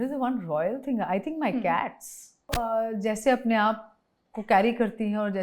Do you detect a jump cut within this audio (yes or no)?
yes